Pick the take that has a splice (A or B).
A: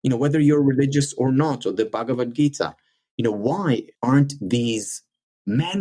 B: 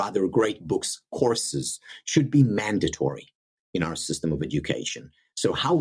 A